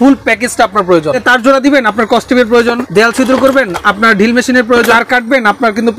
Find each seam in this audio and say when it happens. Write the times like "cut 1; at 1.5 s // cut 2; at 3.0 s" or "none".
cut 1; at 1.2 s // cut 2; at 2.8 s // cut 3; at 5.0 s